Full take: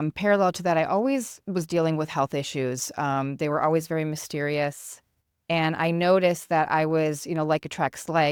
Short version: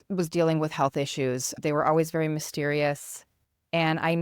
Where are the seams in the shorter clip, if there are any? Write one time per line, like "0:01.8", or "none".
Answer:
0:01.5